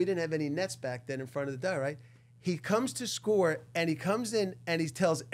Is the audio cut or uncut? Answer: uncut